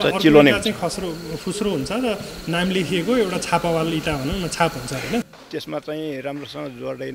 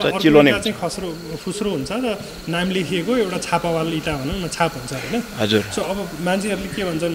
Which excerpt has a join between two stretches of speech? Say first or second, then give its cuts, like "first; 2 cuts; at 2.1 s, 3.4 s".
first; 1 cut; at 5.3 s